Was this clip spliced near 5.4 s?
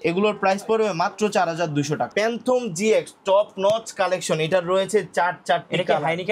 no; 1 cut; at 2.1 s

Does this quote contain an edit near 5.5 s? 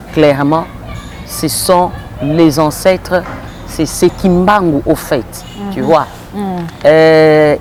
no; 0 cuts

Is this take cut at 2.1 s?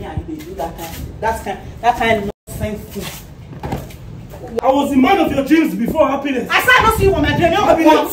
no; 1 cut; at 4.6 s

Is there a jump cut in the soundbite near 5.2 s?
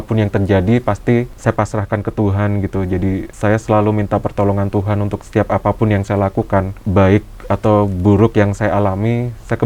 yes; 4 cuts; at 1.3 s, 3.3 s, 5.2 s, 6.8 s

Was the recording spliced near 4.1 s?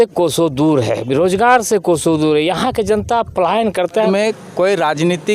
yes; 1 cut; at 4.1 s

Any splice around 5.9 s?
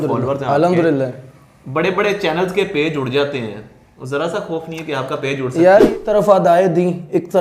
yes; 1 cut; at 5.9 s

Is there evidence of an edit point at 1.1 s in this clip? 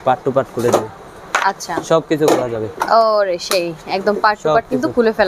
no; 0 cuts

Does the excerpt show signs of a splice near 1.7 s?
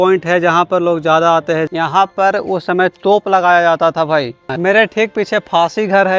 yes; 2 cuts; at 1.7 s, 4.5 s

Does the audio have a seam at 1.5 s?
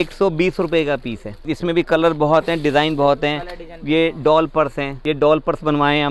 yes; 2 cuts; at 1.5 s, 4.9 s

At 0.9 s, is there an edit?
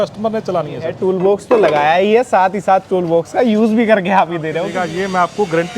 yes; 2 cuts; at 0.9 s, 4.6 s

